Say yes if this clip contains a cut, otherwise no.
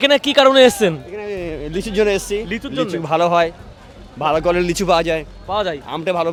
no